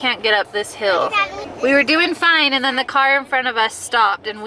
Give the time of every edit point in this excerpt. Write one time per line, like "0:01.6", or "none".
0:01.5